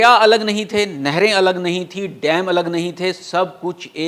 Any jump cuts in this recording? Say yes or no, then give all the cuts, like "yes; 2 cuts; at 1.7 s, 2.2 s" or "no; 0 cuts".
no; 0 cuts